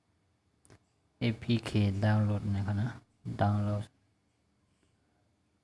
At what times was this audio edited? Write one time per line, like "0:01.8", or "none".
0:01.6